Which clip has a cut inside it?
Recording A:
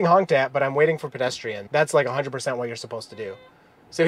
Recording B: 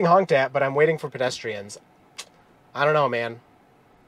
A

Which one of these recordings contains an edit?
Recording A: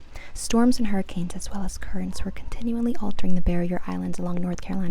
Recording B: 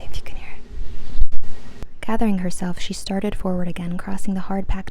B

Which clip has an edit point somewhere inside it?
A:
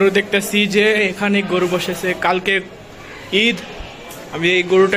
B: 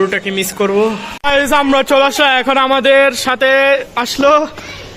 B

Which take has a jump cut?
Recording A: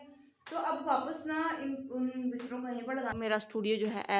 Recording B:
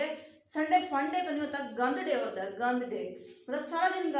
A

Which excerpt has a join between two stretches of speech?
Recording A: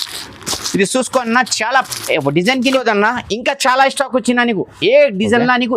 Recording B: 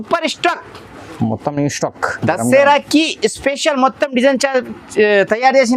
A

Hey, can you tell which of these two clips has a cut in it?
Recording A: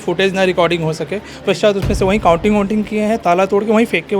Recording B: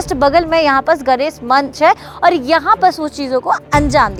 A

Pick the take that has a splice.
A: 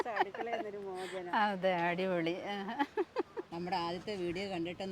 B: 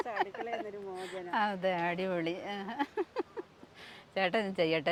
A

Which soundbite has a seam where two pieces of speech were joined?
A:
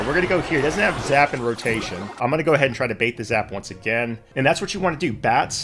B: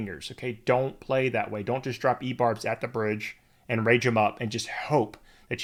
A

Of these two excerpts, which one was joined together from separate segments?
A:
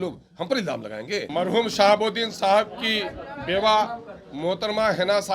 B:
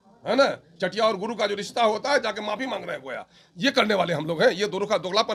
A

